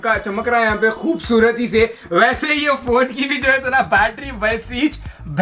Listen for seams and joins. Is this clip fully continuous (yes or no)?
yes